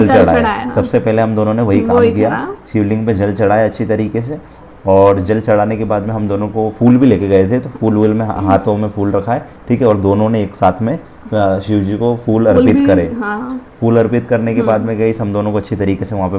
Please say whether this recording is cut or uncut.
uncut